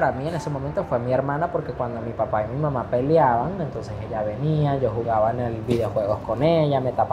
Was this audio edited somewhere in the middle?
no; 0 cuts

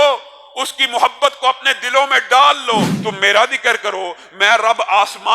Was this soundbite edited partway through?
yes; 1 cut; at 2.9 s

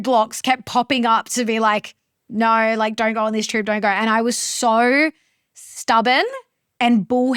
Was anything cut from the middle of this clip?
no; 0 cuts

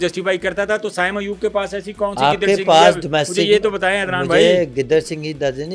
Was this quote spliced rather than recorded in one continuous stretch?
no; 0 cuts

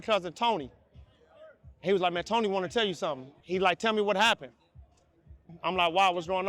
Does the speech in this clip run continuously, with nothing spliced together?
no; 2 cuts; at 3.3 s, 5.5 s

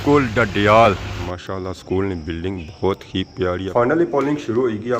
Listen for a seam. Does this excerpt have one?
yes; 2 cuts; at 1.1 s, 3.7 s

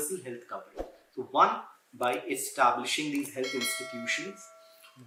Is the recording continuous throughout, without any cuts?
yes; 0 cuts

